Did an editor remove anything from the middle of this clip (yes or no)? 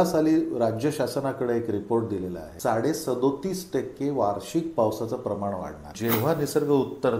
yes